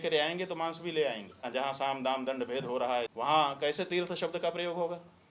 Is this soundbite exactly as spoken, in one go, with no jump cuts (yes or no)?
no